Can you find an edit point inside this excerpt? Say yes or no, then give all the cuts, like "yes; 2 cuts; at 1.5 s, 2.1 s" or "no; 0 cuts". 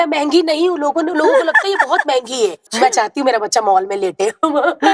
yes; 1 cut; at 2.7 s